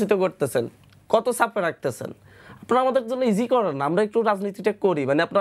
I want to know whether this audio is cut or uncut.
uncut